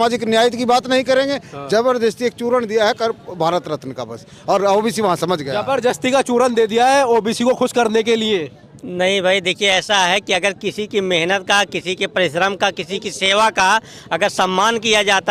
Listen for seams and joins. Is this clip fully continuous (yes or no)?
yes